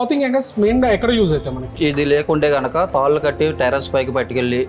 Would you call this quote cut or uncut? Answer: cut